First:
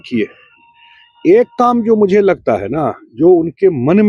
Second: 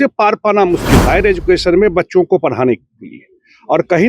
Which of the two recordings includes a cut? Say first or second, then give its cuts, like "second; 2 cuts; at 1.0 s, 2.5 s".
second; 1 cut; at 1.0 s